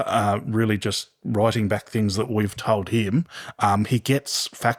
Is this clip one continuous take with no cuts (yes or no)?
yes